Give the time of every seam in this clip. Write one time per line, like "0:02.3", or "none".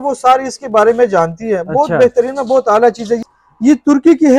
0:03.3

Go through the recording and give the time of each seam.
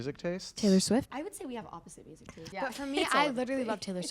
0:01.1
0:02.4

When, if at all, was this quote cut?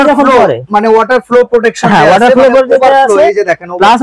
none

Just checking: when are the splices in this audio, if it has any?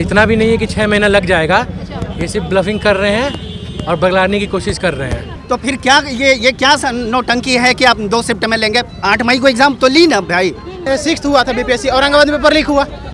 0:05.3
0:10.8

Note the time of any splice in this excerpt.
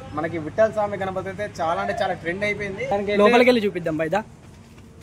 0:02.9

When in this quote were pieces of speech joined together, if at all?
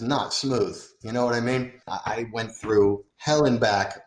0:01.9
0:03.1

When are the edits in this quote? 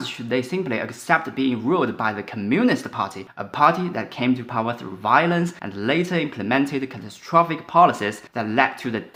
none

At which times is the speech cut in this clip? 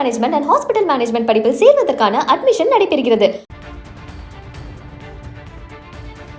0:03.5

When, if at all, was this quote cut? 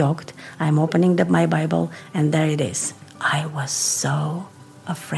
0:03.1

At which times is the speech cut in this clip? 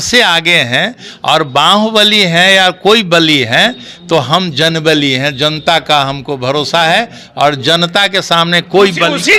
none

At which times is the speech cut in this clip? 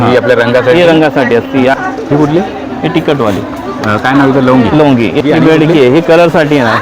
0:01.7
0:05.2

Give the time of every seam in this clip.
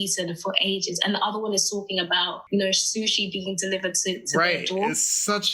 0:02.4

